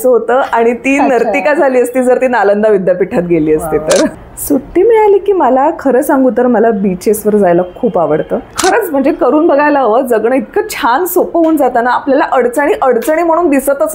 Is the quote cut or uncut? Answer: cut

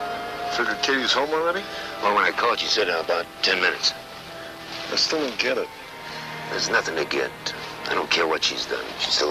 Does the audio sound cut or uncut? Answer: cut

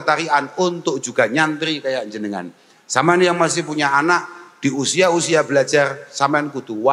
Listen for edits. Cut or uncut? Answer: uncut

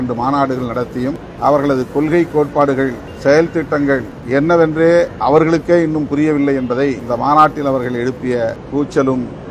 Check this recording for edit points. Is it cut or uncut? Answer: cut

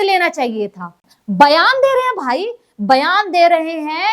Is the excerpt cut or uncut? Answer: cut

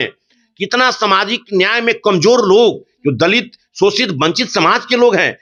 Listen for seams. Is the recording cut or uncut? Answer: uncut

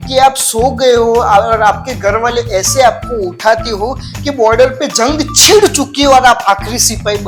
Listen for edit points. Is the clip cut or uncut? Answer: uncut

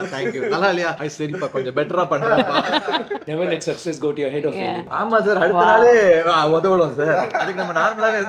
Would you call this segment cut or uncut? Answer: cut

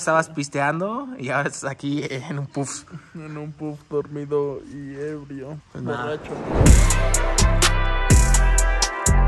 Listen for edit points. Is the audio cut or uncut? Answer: cut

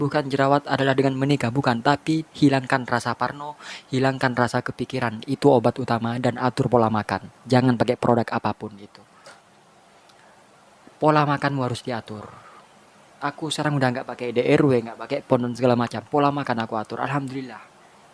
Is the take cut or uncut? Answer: uncut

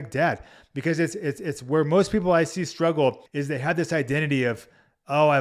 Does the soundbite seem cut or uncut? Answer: cut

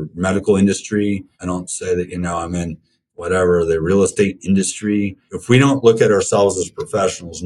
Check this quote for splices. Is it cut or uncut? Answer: cut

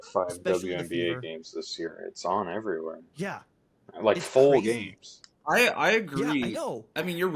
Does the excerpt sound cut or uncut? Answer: uncut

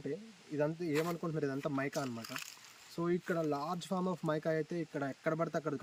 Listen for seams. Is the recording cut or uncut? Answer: uncut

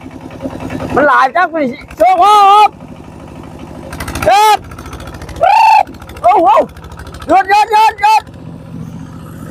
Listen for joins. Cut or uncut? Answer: uncut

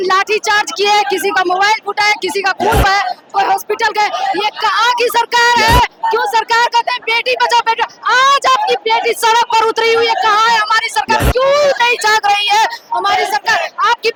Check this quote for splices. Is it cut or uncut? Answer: uncut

